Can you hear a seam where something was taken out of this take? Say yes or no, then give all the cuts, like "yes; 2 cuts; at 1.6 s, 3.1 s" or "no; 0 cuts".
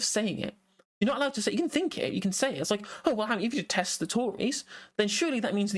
no; 0 cuts